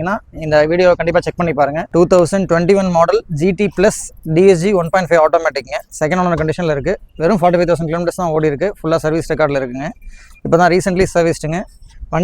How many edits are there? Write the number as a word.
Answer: one